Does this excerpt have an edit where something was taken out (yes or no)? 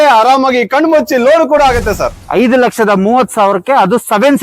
yes